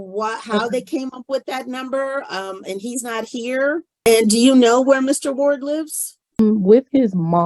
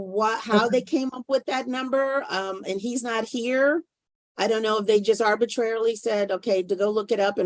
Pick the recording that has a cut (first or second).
first